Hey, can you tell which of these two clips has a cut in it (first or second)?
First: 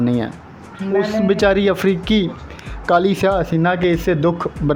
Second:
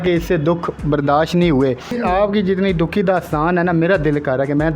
second